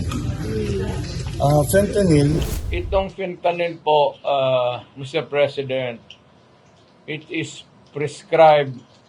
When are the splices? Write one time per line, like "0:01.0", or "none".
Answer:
0:02.4